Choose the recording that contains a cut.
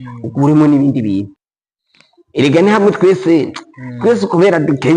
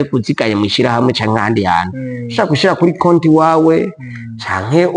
first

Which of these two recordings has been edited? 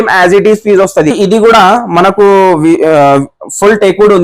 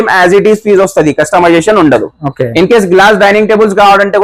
first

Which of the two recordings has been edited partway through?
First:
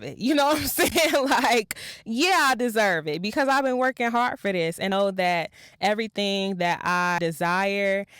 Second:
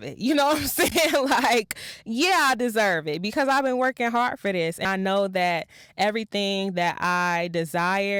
first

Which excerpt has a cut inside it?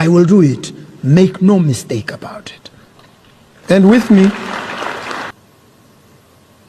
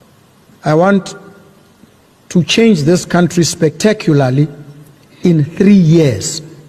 first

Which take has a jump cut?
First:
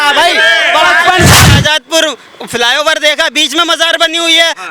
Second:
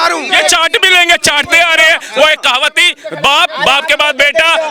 first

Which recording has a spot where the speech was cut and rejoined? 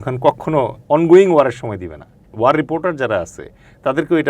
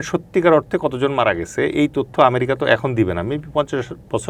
first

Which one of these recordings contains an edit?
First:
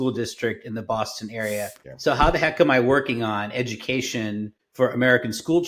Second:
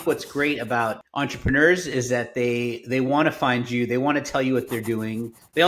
second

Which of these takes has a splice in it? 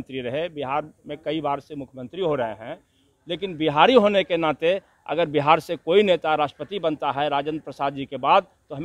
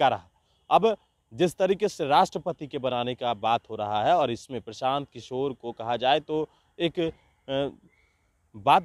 first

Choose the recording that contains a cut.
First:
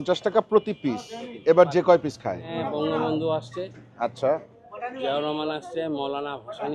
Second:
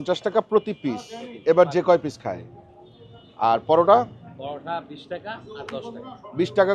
first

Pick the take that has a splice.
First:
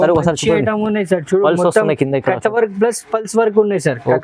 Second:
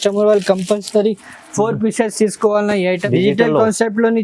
second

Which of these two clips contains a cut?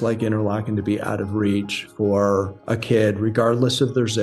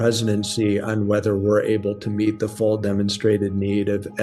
first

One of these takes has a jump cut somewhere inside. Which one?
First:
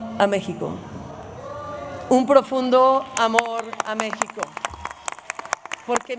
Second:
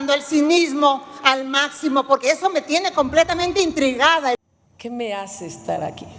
second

